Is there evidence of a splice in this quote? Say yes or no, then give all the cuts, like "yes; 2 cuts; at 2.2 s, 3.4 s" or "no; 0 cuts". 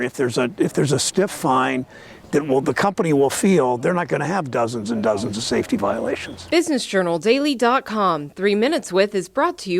yes; 1 cut; at 6.3 s